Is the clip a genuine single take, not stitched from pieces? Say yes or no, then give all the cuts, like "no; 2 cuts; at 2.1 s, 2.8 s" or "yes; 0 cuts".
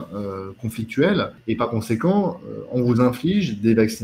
no; 1 cut; at 1.4 s